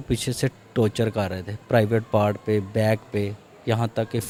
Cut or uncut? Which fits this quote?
uncut